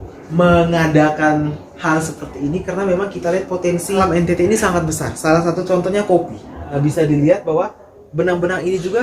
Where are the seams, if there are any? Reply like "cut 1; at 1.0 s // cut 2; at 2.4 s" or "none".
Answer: cut 1; at 4.0 s // cut 2; at 6.7 s